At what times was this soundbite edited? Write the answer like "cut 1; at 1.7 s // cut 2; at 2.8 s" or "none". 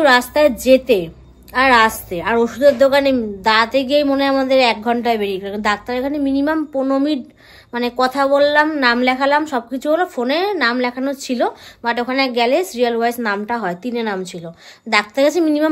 none